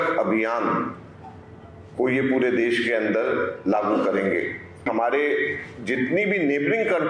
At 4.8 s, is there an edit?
yes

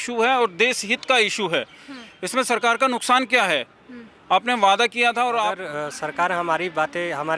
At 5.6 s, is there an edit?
yes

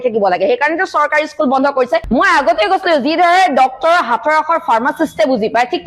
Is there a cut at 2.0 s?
yes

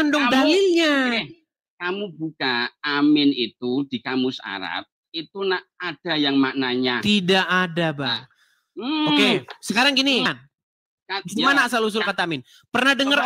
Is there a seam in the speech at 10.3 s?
yes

